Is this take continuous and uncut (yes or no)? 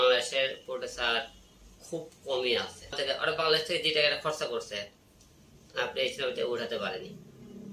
no